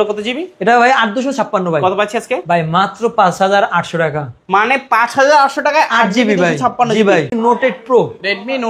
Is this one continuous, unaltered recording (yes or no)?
no